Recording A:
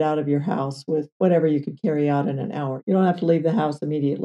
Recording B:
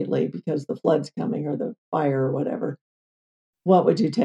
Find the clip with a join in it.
A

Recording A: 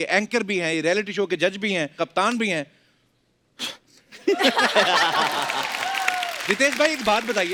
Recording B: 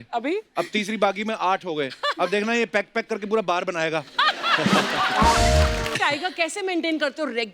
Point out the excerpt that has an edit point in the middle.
B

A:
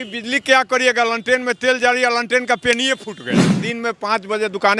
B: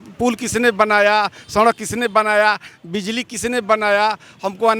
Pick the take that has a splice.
A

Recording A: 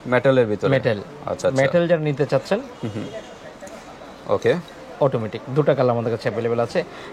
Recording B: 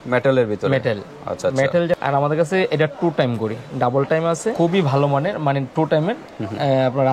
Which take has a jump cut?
B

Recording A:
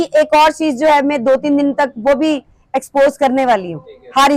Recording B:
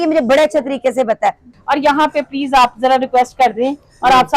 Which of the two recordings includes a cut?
B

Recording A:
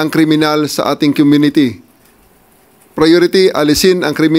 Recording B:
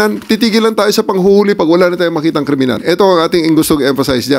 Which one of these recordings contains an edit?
B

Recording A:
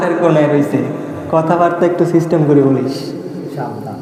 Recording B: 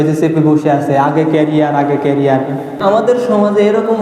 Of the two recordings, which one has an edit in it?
B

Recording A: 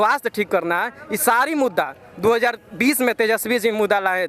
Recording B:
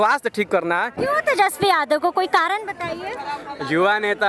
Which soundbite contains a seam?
B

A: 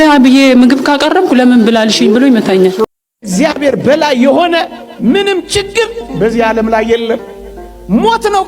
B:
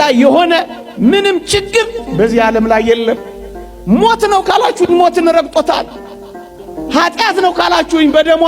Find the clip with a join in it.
A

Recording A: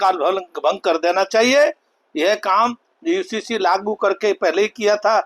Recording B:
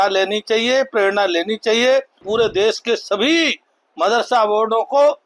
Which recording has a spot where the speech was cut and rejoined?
B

